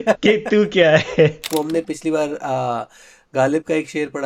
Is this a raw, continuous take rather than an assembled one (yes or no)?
no